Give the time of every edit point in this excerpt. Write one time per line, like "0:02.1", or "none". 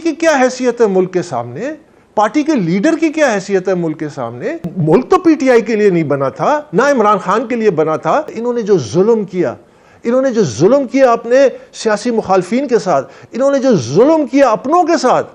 0:04.7
0:08.3